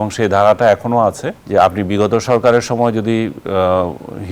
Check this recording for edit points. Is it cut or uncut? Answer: cut